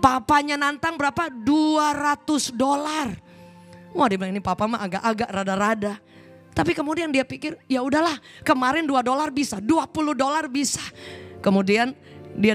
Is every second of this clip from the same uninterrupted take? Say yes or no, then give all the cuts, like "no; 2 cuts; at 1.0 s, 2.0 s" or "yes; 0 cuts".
yes; 0 cuts